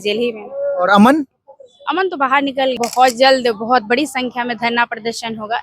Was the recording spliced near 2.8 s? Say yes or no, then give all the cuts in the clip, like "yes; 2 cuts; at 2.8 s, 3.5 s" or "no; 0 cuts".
yes; 1 cut; at 2.8 s